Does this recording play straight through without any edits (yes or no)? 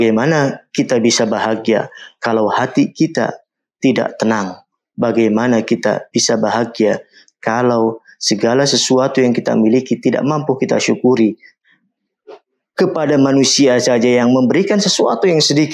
no